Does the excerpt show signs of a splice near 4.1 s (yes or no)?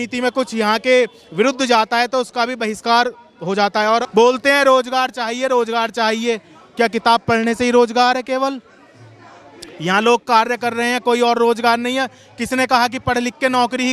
yes